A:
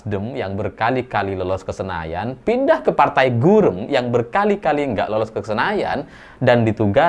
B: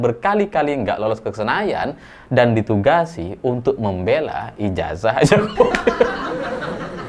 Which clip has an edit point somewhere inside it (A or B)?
B